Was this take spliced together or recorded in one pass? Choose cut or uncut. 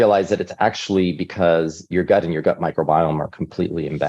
cut